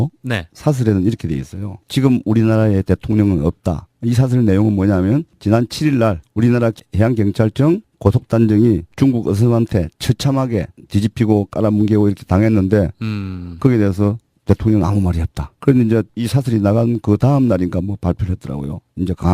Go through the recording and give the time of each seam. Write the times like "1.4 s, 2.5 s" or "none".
11.6 s